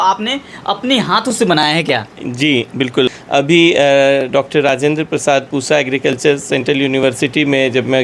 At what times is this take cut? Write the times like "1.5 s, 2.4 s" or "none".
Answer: 3.1 s